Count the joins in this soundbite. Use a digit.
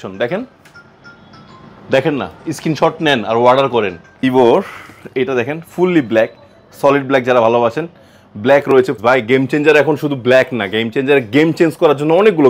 2